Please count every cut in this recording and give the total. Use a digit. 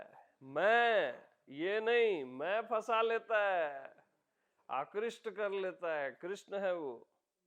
0